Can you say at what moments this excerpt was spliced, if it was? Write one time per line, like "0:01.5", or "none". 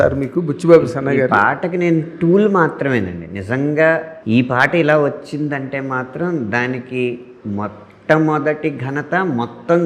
0:04.1